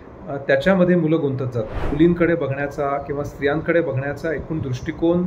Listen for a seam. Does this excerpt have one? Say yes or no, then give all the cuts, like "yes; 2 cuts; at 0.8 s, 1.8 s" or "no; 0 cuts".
yes; 1 cut; at 1.9 s